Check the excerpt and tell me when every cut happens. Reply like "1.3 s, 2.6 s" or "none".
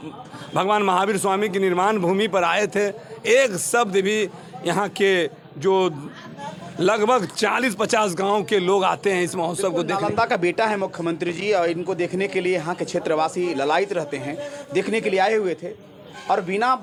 none